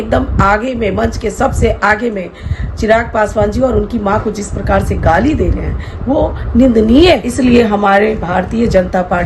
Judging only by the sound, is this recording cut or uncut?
cut